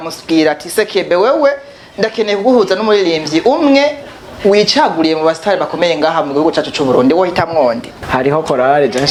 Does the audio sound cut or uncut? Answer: uncut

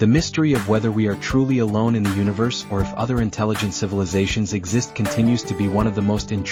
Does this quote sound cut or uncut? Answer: uncut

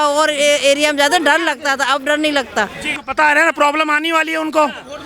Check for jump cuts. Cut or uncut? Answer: cut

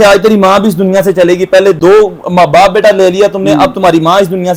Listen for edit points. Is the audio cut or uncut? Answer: uncut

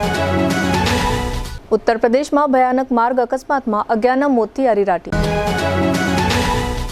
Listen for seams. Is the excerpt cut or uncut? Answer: uncut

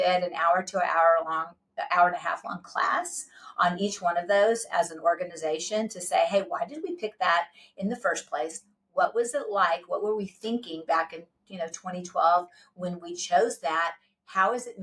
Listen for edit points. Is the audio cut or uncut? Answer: uncut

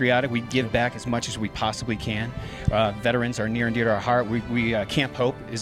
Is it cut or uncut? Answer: uncut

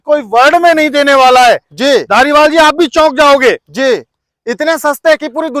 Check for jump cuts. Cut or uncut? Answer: uncut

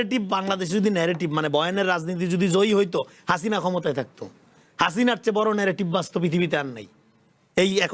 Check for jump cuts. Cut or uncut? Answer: uncut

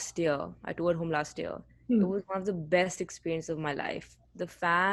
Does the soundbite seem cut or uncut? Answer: uncut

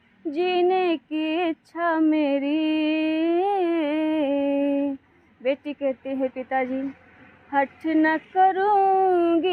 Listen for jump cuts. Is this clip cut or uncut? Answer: uncut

